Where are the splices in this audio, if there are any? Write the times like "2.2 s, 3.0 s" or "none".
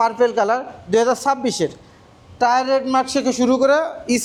none